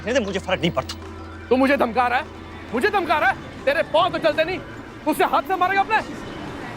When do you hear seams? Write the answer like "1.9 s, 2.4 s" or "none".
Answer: 1.3 s